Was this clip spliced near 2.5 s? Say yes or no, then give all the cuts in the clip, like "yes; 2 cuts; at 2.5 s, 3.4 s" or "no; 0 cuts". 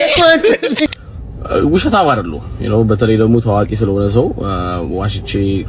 no; 1 cut; at 1.0 s